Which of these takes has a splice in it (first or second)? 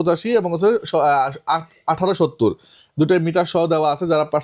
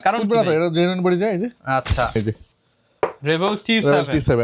second